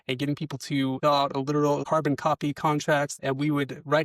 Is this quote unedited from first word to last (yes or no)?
no